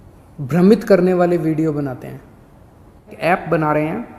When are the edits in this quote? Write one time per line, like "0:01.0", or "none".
0:03.2